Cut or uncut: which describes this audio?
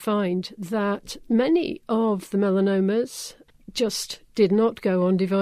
uncut